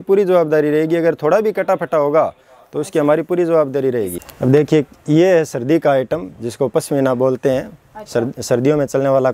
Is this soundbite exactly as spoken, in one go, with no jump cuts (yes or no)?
no